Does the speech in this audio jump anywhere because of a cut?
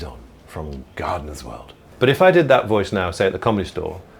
yes; 1 cut; at 1.8 s

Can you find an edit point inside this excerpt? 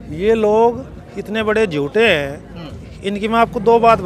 no; 0 cuts

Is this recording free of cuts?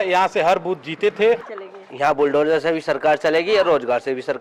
no; 1 cut; at 1.5 s

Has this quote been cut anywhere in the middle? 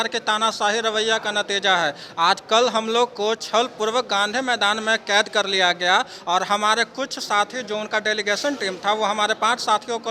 no; 0 cuts

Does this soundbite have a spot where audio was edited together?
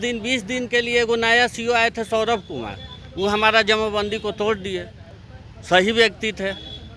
no; 0 cuts

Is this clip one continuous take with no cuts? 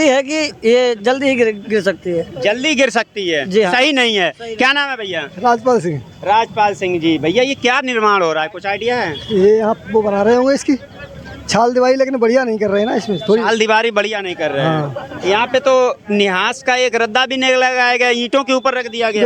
yes; 0 cuts

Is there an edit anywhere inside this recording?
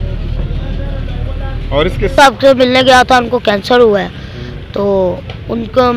yes; 1 cut; at 2.1 s

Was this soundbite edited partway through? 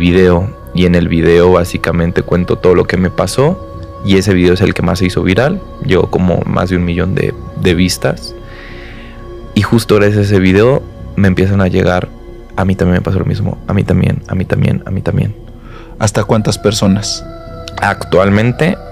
no; 0 cuts

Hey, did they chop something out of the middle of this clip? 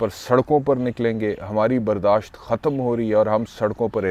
no; 0 cuts

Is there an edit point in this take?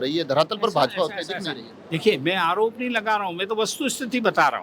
no; 0 cuts

